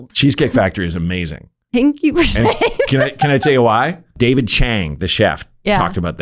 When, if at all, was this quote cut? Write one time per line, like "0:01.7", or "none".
0:04.2